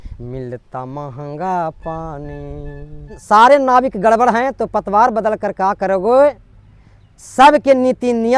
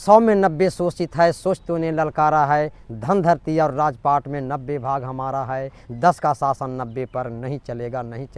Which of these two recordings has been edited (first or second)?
first